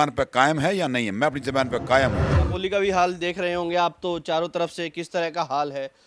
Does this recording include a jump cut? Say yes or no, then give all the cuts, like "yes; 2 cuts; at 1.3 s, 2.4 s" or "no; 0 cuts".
yes; 1 cut; at 2.5 s